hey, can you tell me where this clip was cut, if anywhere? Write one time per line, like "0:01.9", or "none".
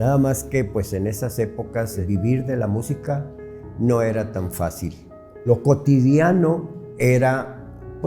0:02.0
0:05.5